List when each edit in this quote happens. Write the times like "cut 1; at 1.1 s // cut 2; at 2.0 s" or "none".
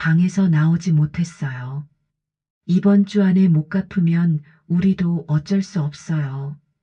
none

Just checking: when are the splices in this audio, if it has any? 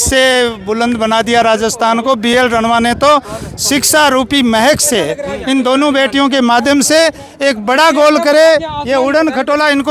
none

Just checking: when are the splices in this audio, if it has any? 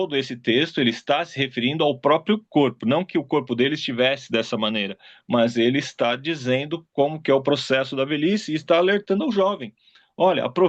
none

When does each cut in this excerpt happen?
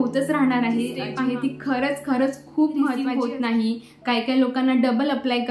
cut 1; at 1.0 s // cut 2; at 2.9 s

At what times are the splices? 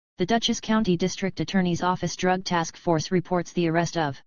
cut 1; at 0.9 s

